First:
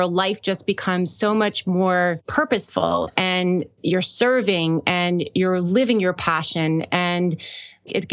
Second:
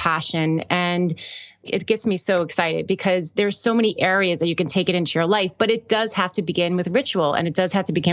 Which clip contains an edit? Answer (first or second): first